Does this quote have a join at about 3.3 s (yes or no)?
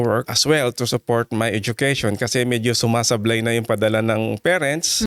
no